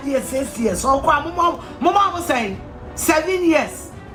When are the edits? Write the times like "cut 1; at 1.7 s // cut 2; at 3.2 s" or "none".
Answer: none